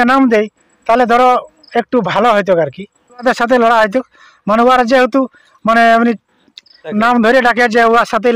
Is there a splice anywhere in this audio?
yes; 2 cuts; at 3.2 s, 6.9 s

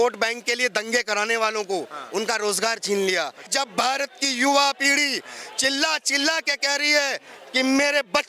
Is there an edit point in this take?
yes; 1 cut; at 3.5 s

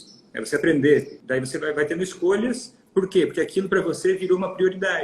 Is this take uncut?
no; 1 cut; at 1.2 s

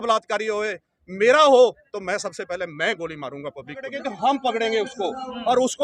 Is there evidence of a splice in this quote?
yes; 1 cut; at 4.1 s

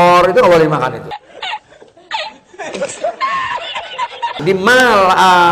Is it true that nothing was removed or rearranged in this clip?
no; 1 cut; at 4.4 s

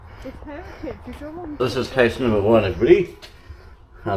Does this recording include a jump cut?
yes; 1 cut; at 1.6 s

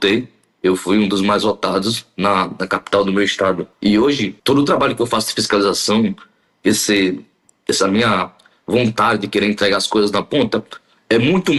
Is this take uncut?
yes; 0 cuts

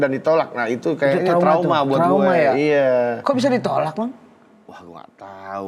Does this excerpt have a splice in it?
no; 0 cuts

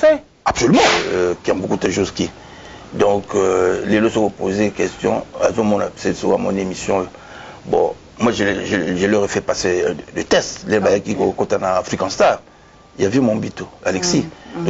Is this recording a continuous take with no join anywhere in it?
no; 1 cut; at 1.0 s

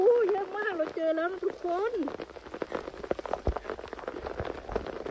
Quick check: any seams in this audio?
yes; 1 cut; at 4.1 s

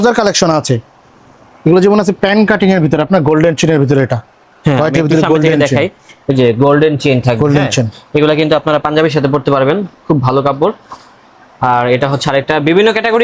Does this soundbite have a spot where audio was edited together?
no; 0 cuts

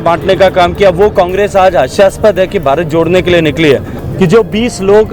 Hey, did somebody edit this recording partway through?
yes; 1 cut; at 4.0 s

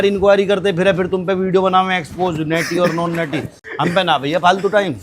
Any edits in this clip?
no; 0 cuts

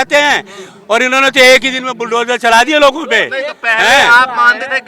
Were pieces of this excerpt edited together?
no; 0 cuts

